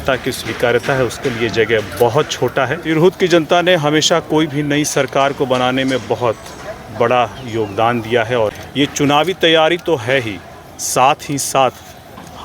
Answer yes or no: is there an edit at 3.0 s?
yes